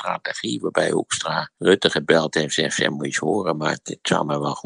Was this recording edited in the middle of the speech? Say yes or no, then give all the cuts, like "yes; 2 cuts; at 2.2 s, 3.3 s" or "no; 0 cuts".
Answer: yes; 1 cut; at 1.5 s